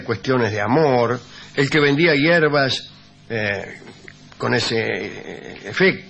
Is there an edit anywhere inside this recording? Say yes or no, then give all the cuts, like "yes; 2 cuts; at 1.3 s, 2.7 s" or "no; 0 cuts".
yes; 1 cut; at 3.9 s